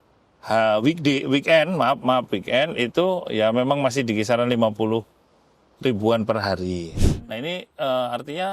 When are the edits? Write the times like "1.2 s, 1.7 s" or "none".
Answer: 6.9 s